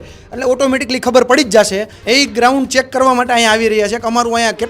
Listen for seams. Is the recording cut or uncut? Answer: cut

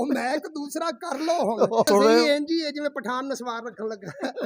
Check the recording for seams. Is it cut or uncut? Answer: cut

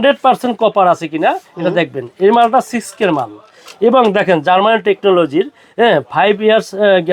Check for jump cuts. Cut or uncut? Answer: uncut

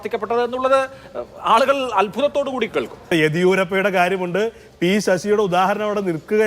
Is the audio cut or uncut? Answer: cut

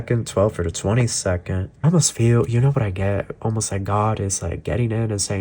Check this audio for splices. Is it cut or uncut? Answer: cut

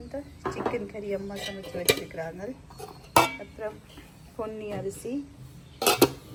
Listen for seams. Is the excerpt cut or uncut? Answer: uncut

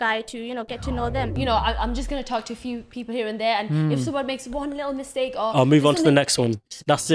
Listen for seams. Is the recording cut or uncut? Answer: cut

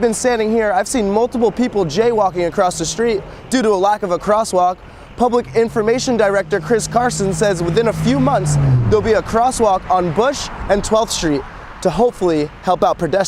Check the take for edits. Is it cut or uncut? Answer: uncut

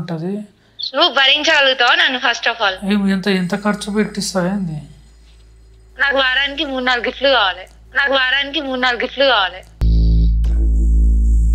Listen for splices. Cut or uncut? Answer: uncut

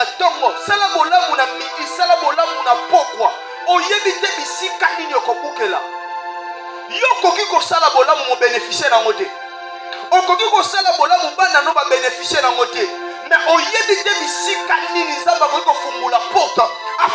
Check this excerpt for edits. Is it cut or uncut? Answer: uncut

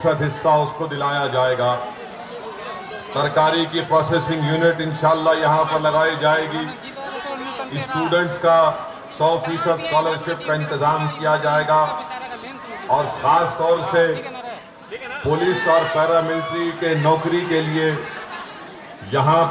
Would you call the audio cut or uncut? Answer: uncut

